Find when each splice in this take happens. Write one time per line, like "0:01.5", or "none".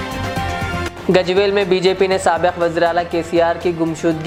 none